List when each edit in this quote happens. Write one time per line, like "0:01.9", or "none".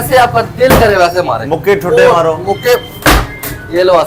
none